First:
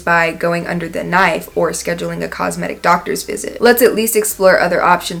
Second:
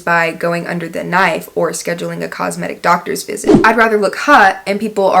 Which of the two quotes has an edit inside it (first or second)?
second